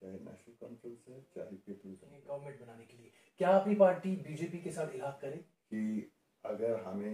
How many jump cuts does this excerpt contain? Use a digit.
2